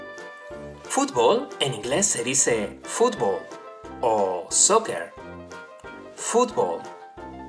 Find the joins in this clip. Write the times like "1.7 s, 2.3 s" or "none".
0.9 s